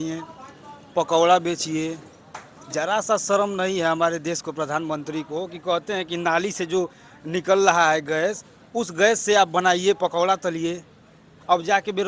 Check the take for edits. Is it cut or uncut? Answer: uncut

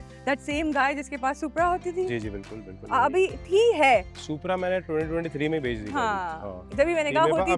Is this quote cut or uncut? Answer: uncut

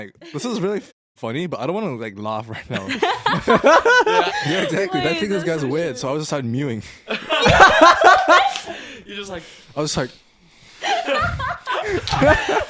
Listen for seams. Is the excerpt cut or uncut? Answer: cut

